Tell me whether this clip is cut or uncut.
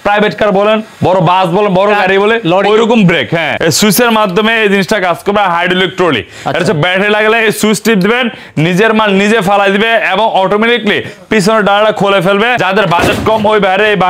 cut